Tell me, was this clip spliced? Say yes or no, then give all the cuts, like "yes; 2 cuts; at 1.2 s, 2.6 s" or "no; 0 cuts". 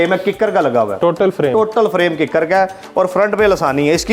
no; 0 cuts